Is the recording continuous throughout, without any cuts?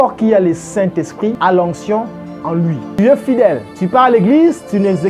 no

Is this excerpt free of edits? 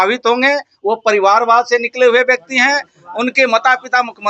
yes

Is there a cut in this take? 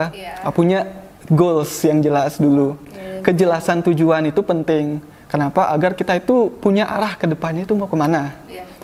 no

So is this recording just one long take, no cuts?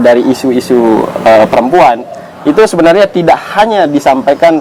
yes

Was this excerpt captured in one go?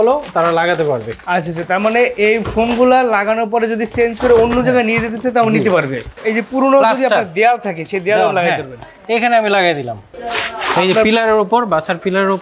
yes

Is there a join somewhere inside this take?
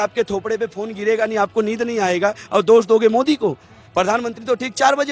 no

